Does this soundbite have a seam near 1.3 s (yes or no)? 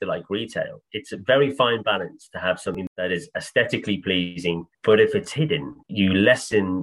no